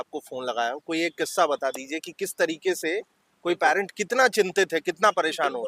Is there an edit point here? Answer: no; 0 cuts

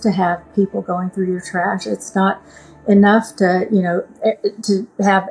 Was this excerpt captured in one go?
yes; 0 cuts

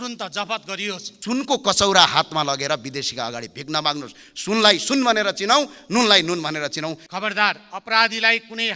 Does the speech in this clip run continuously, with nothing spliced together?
no; 2 cuts; at 1.1 s, 7.0 s

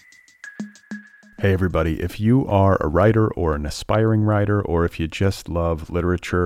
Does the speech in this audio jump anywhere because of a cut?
yes; 1 cut; at 1.0 s

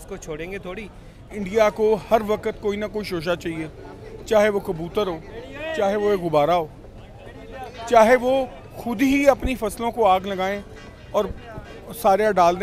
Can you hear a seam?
yes; 1 cut; at 1.3 s

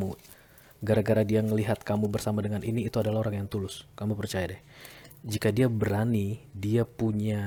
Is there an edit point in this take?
no; 0 cuts

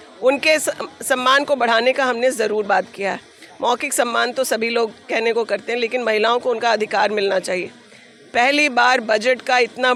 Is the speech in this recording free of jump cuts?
yes; 0 cuts

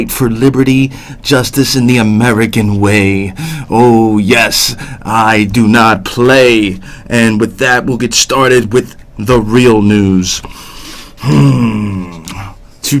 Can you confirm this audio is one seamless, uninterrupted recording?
no; 1 cut; at 4.0 s

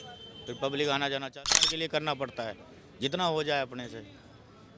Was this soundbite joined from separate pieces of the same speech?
yes; 1 cut; at 1.6 s

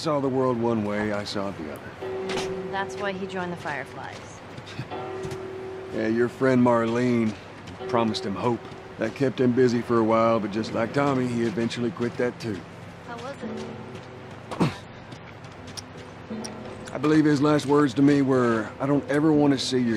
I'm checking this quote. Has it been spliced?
no; 0 cuts

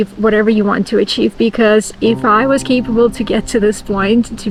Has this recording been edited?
no; 0 cuts

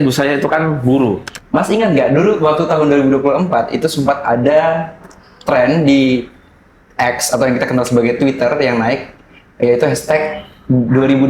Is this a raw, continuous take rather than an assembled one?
no; 1 cut; at 1.3 s

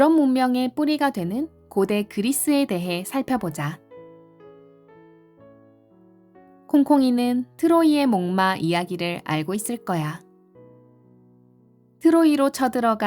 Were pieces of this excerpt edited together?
yes; 2 cuts; at 4.4 s, 6.6 s

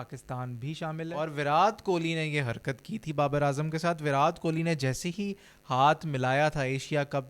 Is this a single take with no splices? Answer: no; 1 cut; at 1.1 s

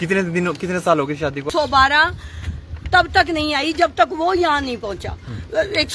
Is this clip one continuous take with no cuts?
no; 1 cut; at 1.4 s

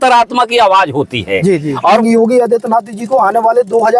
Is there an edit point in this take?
yes; 1 cut; at 2.0 s

